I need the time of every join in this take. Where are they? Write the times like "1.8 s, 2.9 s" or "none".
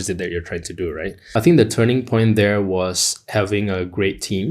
1.2 s